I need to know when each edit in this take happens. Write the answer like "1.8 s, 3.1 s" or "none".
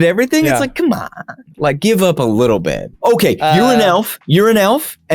1.4 s, 2.9 s